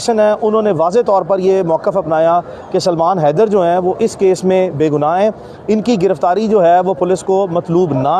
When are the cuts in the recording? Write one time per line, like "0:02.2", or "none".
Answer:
none